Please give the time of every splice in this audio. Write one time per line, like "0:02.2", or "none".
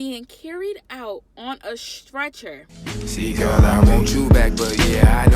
0:02.7

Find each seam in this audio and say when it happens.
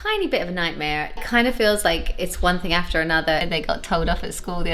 0:01.2
0:03.5

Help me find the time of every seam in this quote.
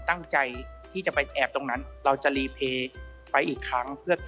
0:01.9

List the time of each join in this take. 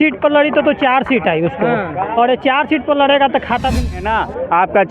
0:04.0

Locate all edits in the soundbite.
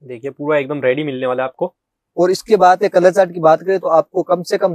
none

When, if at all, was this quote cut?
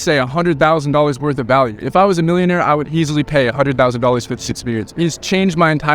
0:05.0

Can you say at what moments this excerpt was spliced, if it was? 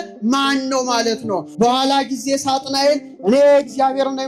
0:01.5

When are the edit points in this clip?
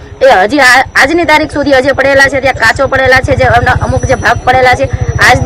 none

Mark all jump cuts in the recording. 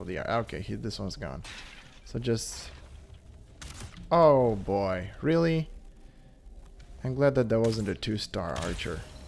none

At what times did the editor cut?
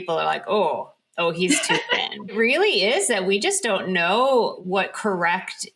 0:02.3
0:04.6

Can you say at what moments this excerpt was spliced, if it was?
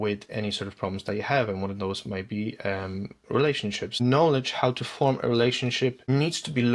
0:04.0

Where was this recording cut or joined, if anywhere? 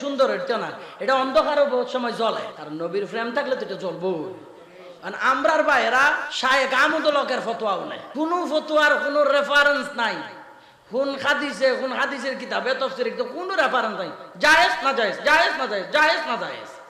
0:02.6
0:06.3
0:08.0

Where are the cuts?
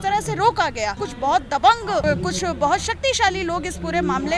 0:01.0
0:02.0

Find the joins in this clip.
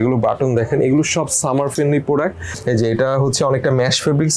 0:02.5

